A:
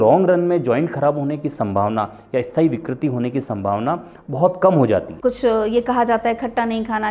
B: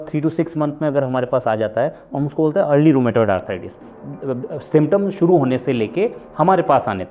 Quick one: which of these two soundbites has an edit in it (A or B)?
A